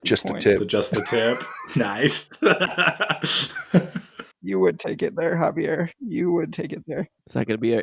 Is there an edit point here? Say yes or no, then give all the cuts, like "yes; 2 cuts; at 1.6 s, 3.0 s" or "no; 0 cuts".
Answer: no; 0 cuts